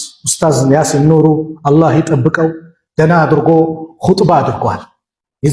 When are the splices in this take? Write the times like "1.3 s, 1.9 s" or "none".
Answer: none